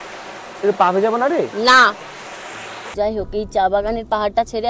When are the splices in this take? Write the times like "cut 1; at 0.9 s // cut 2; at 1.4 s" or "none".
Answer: cut 1; at 2.9 s